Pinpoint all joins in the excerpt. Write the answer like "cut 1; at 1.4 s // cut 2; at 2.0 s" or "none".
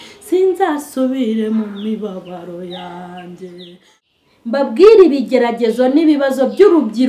cut 1; at 4.0 s